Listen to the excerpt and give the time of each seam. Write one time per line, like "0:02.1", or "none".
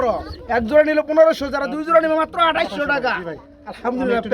none

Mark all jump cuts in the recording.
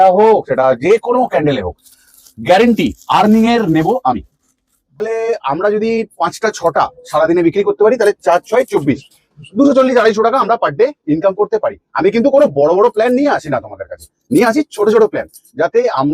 0:05.0

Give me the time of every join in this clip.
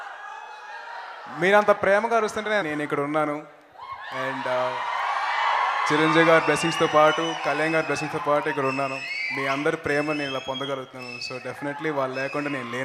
none

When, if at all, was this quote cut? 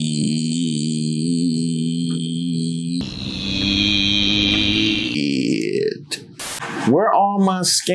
0:03.0

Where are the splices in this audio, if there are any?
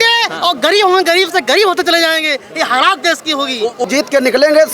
0:03.8

